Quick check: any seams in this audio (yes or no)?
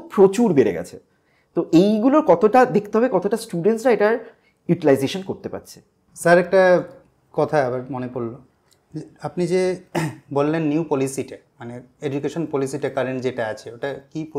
no